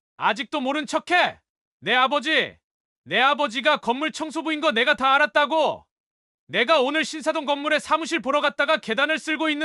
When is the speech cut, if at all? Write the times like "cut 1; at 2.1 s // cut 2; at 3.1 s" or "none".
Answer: none

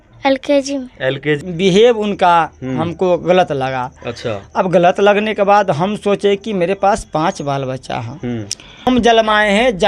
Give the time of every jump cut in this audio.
cut 1; at 1.4 s // cut 2; at 8.9 s

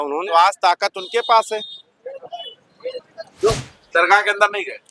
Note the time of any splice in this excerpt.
cut 1; at 3.5 s

